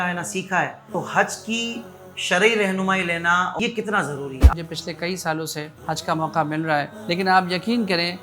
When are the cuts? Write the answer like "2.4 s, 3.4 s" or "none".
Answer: 0.8 s, 3.6 s, 4.5 s, 5.7 s, 6.9 s